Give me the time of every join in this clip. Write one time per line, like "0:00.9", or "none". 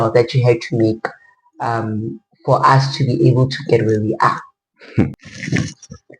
0:05.2